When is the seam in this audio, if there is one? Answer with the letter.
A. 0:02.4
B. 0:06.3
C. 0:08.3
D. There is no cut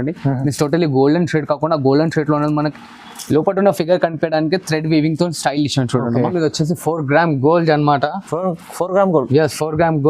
B